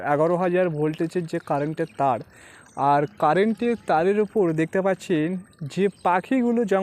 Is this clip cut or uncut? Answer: uncut